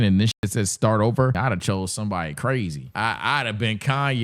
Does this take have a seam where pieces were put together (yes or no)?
yes